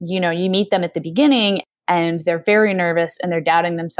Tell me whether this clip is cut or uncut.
cut